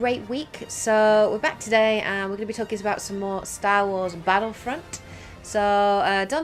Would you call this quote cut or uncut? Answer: uncut